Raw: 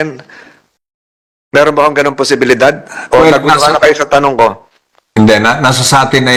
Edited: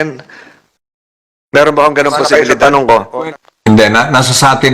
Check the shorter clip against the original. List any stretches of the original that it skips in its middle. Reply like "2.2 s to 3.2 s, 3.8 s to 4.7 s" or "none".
2.2 s to 3.7 s